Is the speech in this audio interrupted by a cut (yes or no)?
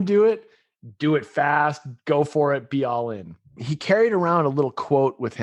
yes